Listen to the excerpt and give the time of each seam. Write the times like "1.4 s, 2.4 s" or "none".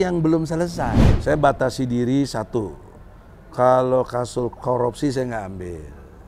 1.1 s